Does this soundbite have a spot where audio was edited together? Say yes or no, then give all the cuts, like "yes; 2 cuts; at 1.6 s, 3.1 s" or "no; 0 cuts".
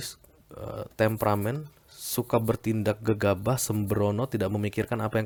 no; 0 cuts